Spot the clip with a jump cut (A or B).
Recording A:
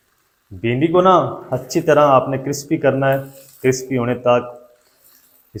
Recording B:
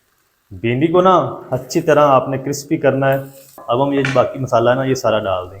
B